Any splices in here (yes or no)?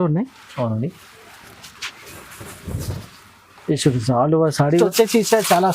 yes